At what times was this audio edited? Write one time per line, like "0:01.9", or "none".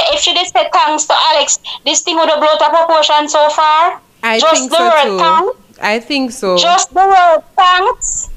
none